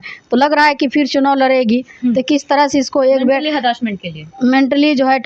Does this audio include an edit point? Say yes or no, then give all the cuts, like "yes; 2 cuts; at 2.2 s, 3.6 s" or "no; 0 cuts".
no; 0 cuts